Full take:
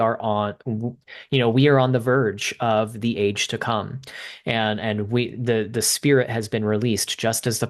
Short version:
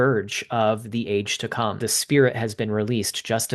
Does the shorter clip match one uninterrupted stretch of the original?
no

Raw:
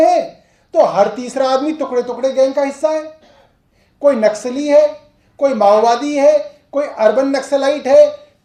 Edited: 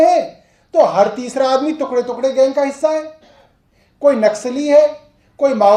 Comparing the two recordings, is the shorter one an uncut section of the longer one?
yes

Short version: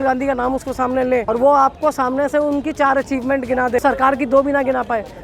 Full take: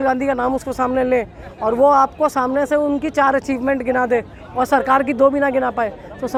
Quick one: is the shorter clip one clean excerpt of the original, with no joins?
no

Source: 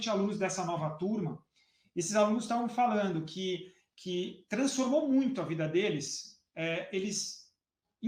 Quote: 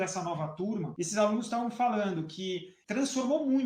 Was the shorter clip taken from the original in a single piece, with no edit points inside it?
no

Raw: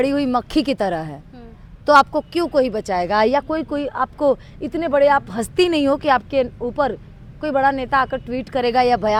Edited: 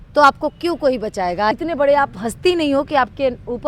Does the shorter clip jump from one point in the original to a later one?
yes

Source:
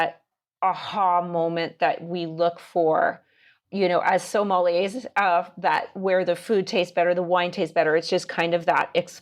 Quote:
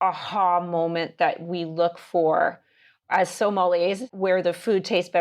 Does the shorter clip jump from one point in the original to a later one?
yes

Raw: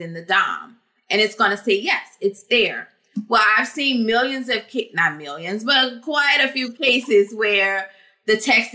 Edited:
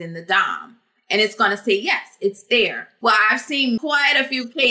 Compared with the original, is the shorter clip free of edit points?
no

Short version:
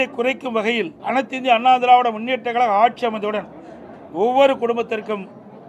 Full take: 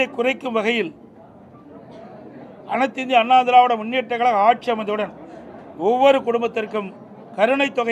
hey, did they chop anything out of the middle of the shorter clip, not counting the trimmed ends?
yes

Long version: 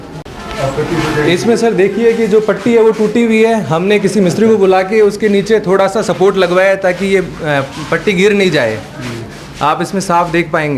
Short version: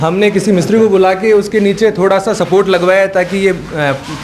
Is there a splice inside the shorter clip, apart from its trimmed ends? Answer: no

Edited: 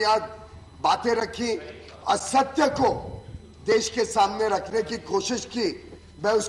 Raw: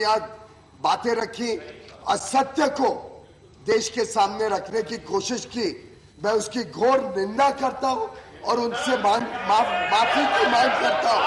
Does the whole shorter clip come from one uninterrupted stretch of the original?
yes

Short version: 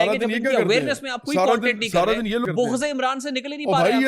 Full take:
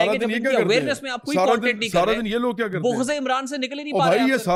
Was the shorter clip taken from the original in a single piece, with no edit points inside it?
no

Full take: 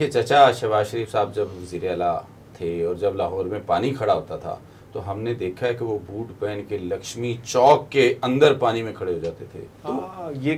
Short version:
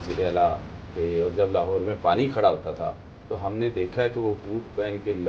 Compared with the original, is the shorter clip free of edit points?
yes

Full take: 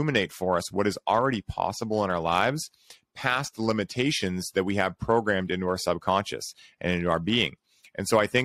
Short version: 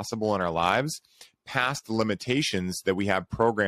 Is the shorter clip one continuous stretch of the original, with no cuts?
yes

